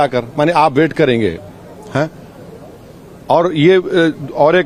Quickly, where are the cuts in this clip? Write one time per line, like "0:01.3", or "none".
none

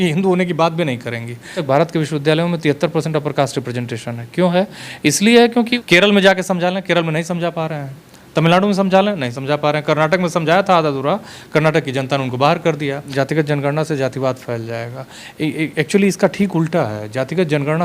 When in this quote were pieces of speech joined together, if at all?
0:01.6
0:05.8
0:13.1

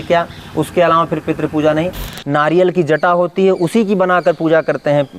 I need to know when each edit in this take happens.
0:02.1

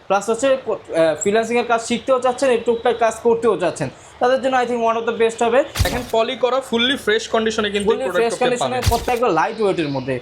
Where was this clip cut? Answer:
0:05.9
0:09.0

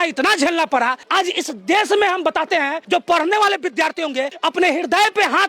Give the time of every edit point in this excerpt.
0:01.0
0:02.8
0:04.3

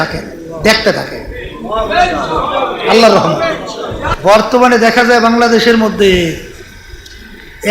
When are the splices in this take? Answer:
0:04.0

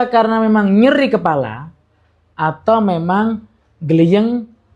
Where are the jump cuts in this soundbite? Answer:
none

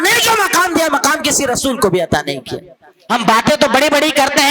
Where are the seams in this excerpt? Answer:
0:03.0

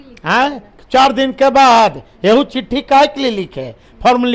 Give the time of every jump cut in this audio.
none

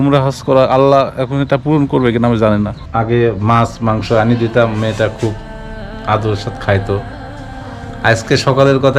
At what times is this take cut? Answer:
0:02.8

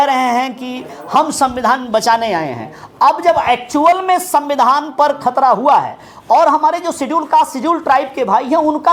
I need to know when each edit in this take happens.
none

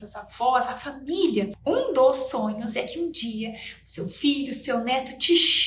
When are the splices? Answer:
0:01.5

